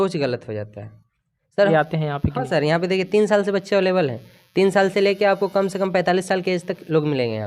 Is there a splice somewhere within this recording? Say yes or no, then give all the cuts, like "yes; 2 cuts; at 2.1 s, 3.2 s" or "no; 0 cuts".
yes; 1 cut; at 1.7 s